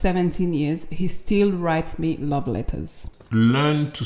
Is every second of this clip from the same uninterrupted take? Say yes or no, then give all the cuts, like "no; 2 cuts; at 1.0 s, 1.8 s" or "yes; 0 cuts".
no; 1 cut; at 3.1 s